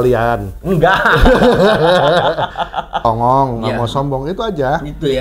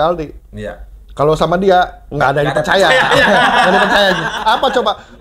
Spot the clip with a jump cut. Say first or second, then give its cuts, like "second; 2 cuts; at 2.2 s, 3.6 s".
first; 1 cut; at 3.0 s